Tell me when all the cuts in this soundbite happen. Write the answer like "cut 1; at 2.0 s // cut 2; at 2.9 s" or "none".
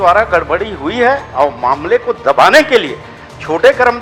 none

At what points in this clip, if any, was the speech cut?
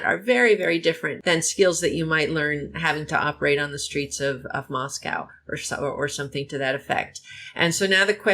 cut 1; at 1.1 s

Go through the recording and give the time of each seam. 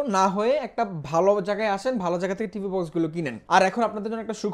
cut 1; at 3.4 s

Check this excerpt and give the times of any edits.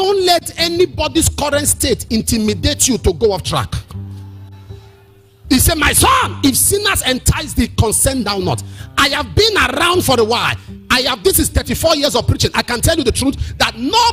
none

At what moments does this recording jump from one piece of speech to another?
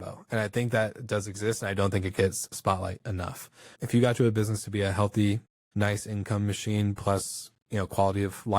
cut 1; at 2.5 s // cut 2; at 3.7 s // cut 3; at 5.6 s

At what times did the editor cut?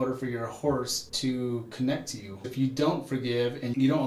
cut 1; at 1.0 s // cut 2; at 2.5 s

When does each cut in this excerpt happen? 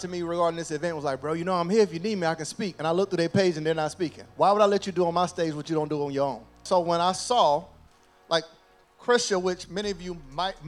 cut 1; at 6.6 s

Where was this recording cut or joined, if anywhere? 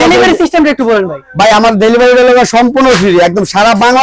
none

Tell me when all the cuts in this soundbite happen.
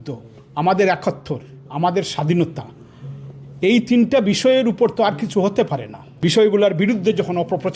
cut 1; at 6.2 s

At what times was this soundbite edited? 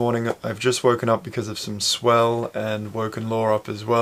none

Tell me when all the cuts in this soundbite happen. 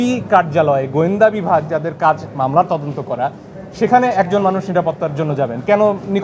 none

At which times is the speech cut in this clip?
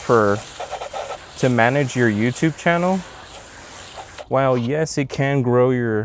none

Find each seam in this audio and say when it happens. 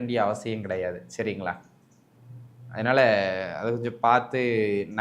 none

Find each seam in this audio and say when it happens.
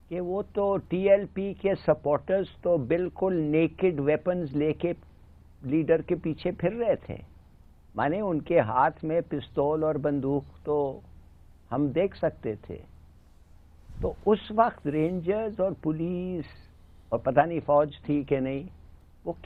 none

